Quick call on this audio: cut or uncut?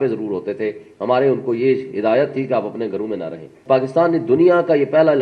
cut